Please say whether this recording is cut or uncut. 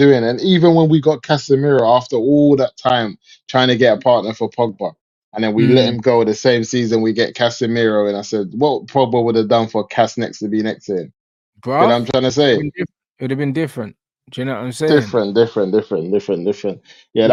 uncut